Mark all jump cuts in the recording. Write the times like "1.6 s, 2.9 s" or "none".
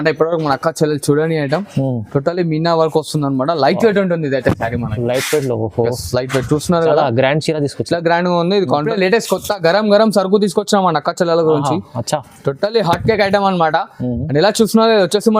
8.9 s